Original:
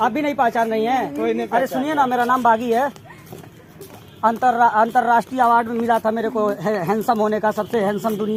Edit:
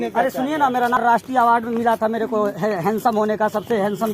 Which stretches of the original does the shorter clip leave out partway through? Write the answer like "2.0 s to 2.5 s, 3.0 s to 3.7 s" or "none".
2.4 s to 5.0 s